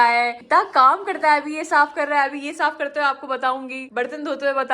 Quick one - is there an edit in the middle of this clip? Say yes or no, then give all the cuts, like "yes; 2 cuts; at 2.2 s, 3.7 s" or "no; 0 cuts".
yes; 1 cut; at 3.8 s